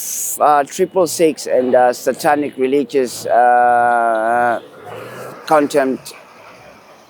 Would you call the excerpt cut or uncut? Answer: uncut